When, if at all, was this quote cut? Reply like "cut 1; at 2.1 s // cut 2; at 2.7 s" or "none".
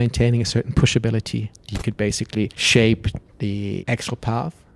cut 1; at 1.7 s // cut 2; at 2.6 s // cut 3; at 3.8 s